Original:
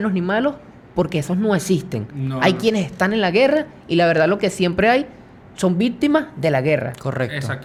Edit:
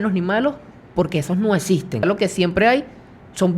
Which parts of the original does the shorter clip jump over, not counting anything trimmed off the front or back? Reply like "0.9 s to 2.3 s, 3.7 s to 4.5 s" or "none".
2.0 s to 4.3 s